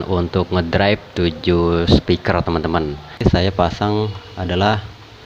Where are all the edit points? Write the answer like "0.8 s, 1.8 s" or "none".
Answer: 3.2 s